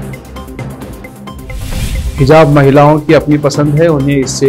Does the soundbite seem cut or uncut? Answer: cut